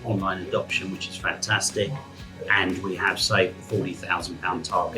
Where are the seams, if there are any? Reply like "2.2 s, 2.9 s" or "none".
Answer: none